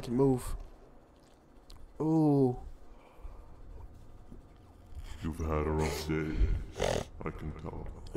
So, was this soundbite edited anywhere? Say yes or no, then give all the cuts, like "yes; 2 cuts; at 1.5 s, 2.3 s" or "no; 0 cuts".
no; 0 cuts